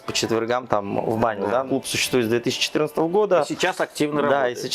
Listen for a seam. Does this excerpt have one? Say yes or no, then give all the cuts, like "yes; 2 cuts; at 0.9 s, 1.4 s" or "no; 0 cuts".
yes; 1 cut; at 1.7 s